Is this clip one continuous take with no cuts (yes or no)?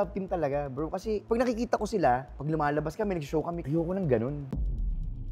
no